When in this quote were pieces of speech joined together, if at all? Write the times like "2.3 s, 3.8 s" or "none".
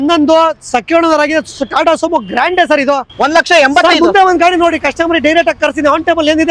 3.1 s